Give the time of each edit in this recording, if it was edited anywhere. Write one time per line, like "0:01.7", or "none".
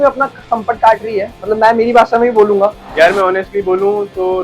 0:02.8